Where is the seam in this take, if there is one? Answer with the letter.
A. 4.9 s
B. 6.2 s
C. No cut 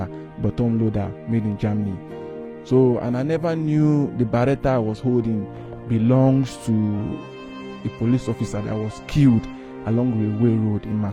C